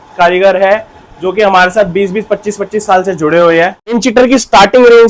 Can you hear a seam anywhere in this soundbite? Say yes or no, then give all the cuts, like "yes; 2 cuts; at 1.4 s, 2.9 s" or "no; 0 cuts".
yes; 1 cut; at 4.0 s